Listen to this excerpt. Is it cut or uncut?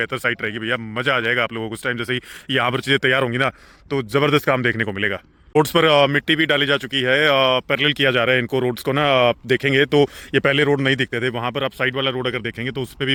uncut